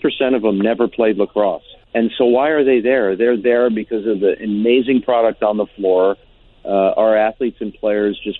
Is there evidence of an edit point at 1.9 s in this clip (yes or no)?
yes